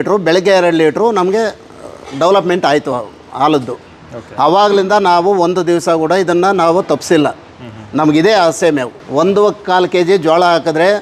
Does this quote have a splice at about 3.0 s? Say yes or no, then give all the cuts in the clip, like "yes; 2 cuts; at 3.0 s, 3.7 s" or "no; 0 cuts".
no; 0 cuts